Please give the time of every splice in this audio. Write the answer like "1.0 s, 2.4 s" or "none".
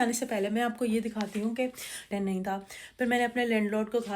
2.1 s